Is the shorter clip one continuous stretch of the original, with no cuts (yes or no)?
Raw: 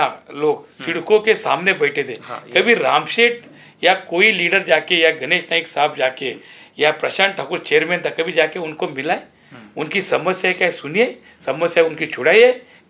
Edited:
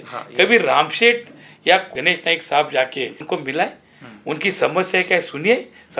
no